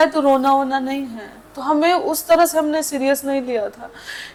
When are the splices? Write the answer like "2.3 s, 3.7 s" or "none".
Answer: none